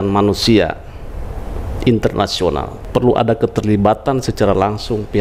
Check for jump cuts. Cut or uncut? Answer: cut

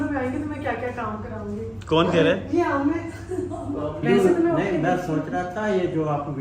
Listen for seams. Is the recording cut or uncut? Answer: cut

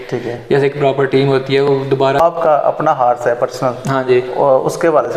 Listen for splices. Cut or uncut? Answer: cut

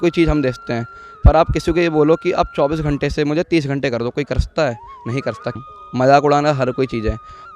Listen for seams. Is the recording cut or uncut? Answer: cut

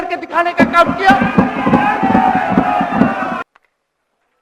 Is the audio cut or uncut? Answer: cut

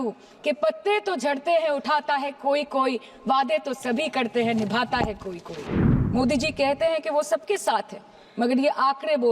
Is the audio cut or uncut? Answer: cut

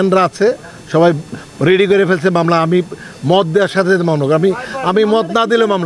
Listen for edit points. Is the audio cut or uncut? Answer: uncut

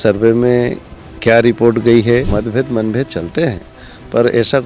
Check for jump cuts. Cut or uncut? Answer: cut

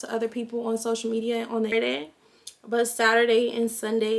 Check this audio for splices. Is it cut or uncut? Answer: cut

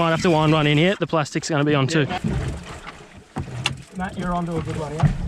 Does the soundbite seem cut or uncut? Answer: cut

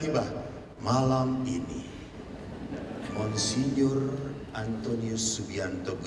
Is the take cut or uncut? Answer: uncut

